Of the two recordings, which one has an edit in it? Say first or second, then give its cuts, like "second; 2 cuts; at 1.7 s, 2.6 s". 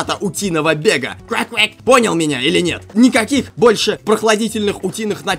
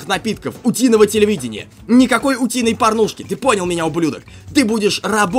first; 3 cuts; at 1.4 s, 2.8 s, 3.7 s